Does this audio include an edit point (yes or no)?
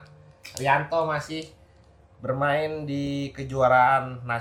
no